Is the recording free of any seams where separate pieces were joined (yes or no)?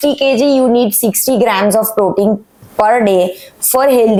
yes